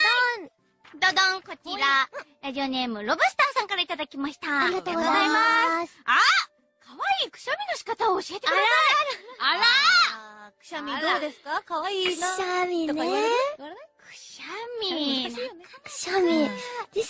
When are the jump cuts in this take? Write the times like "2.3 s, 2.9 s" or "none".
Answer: none